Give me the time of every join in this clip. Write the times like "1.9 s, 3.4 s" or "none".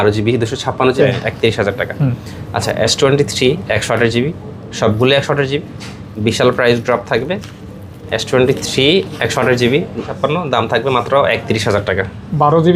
1.0 s, 10.1 s